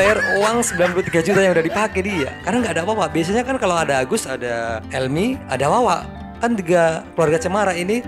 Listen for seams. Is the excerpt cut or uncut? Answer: uncut